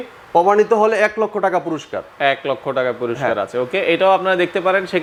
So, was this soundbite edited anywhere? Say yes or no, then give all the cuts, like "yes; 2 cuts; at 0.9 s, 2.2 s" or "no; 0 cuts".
no; 0 cuts